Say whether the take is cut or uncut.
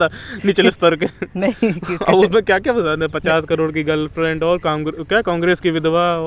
cut